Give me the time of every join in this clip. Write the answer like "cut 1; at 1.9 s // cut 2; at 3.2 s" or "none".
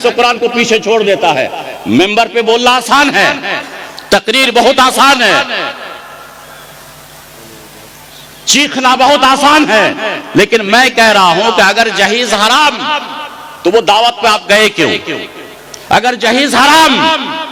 none